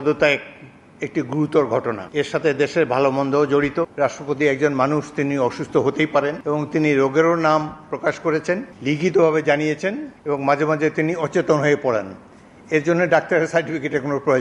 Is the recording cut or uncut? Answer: cut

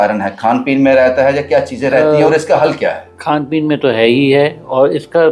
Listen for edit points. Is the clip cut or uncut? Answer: uncut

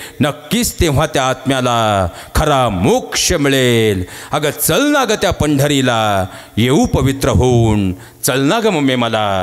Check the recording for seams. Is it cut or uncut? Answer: uncut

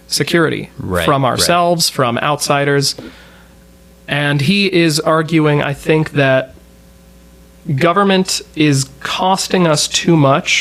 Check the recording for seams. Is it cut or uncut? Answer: uncut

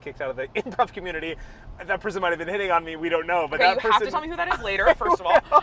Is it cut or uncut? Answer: uncut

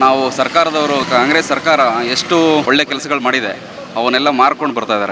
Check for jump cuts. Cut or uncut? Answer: cut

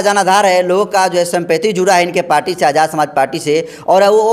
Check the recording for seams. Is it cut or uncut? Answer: uncut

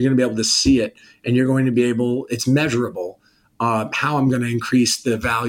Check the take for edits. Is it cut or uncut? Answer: uncut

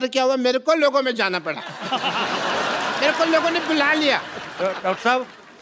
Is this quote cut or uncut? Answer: uncut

